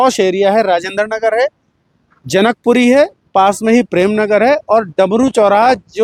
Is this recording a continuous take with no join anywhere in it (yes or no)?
yes